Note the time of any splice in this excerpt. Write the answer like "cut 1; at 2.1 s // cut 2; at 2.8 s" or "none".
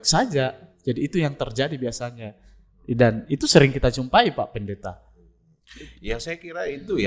none